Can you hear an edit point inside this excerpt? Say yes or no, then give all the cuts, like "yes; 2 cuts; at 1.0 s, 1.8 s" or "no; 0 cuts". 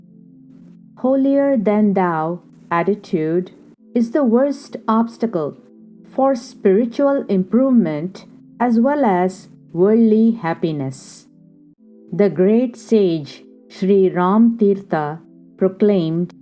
yes; 1 cut; at 0.9 s